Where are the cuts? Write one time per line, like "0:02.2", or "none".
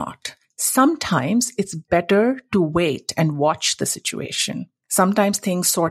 0:04.8